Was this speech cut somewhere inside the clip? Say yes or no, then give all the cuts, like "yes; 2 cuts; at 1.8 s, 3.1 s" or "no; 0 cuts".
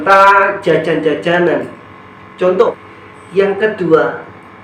yes; 1 cut; at 2.7 s